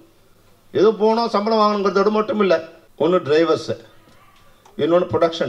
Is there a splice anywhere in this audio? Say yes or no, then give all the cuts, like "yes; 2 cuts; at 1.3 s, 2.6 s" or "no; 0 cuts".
yes; 1 cut; at 2.8 s